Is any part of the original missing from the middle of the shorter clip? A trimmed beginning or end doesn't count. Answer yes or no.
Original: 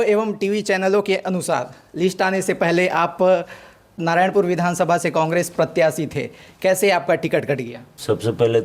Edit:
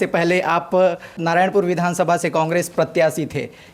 yes